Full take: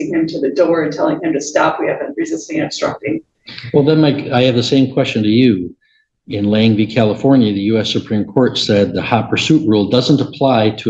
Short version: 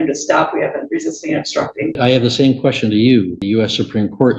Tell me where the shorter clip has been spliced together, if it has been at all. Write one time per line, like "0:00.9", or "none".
0:01.9
0:03.4